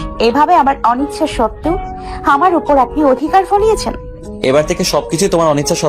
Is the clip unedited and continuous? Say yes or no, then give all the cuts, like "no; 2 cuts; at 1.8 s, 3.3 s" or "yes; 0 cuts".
yes; 0 cuts